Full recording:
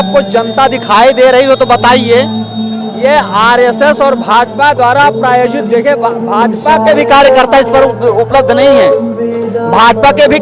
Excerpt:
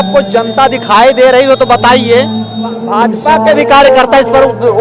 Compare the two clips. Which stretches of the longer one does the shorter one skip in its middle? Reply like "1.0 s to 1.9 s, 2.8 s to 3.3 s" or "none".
2.8 s to 6.2 s